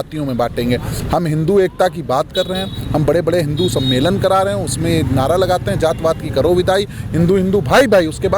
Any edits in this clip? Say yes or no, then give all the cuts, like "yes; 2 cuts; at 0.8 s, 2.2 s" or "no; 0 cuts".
no; 0 cuts